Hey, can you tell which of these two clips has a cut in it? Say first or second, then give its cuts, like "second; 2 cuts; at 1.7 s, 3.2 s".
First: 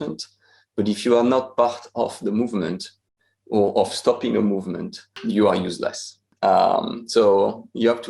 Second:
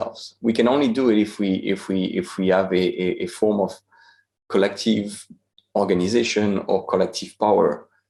first; 1 cut; at 5.2 s